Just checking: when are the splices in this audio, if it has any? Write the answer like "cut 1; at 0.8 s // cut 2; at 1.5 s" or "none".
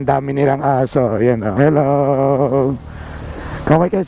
cut 1; at 1.5 s